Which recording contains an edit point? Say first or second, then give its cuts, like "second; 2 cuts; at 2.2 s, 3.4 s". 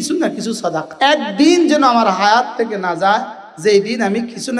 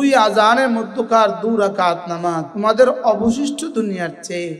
second; 1 cut; at 2.5 s